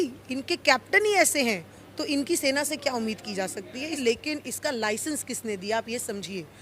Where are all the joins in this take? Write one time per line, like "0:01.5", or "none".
0:04.0